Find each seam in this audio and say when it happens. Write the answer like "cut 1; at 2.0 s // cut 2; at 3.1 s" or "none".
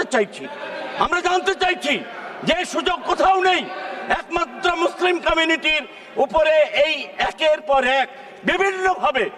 none